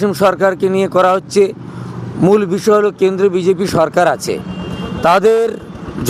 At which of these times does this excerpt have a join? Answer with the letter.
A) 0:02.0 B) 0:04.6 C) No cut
C